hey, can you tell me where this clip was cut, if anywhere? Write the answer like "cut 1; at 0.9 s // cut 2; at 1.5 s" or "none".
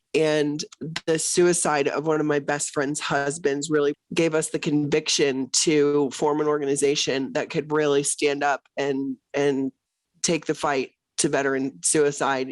cut 1; at 4.0 s